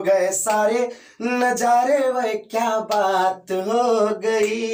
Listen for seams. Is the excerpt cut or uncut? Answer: uncut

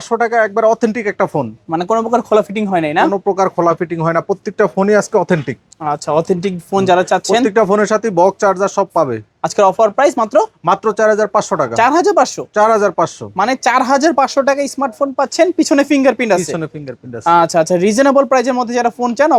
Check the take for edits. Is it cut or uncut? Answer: uncut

